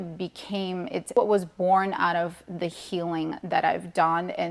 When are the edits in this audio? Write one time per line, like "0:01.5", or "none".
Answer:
0:01.1